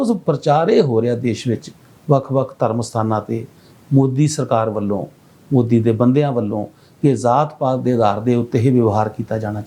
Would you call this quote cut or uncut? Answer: uncut